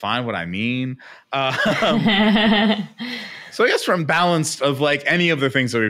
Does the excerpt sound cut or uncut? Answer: uncut